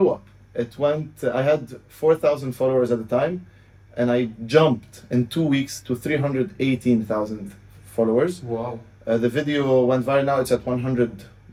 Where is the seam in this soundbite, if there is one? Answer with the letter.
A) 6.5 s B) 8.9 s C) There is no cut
C